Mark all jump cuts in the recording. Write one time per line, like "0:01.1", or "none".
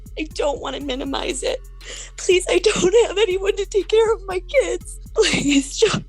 0:01.8
0:04.9